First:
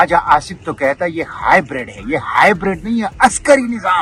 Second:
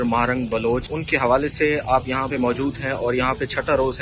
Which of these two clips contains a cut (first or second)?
second